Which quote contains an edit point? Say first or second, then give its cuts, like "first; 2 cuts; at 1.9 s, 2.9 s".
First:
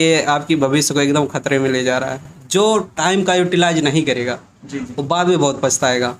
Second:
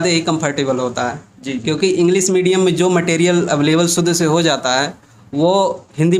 first; 1 cut; at 2.3 s